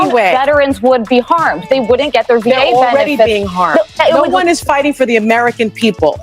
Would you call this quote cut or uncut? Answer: cut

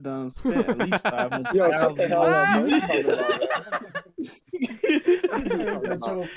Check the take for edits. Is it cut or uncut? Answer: uncut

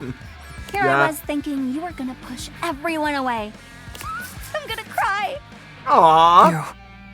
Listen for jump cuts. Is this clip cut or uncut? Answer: uncut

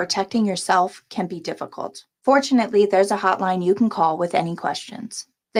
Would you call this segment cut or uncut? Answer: uncut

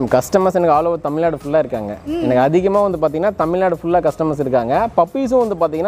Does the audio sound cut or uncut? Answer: uncut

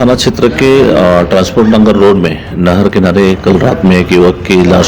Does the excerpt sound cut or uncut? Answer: uncut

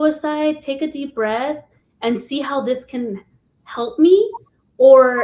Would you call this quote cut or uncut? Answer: uncut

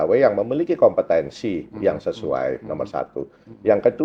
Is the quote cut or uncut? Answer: uncut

